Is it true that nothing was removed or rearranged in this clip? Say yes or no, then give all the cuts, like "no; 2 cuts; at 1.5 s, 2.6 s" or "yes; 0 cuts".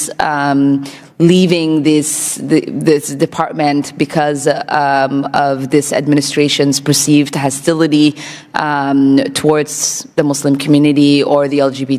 yes; 0 cuts